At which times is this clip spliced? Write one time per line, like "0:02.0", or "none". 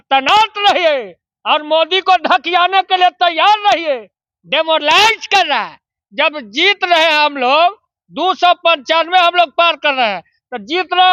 none